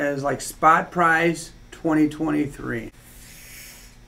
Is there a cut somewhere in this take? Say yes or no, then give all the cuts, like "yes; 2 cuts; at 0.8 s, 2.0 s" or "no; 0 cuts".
yes; 1 cut; at 2.9 s